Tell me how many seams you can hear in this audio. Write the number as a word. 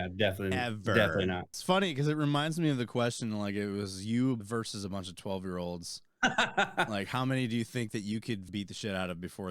three